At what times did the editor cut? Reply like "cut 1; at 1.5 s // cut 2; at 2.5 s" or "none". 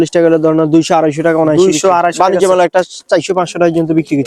none